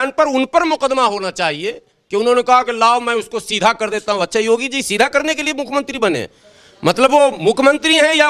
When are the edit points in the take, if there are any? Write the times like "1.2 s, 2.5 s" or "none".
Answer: none